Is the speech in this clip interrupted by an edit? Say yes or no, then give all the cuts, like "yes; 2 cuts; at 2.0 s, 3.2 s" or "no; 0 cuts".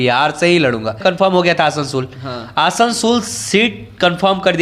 yes; 1 cut; at 1.0 s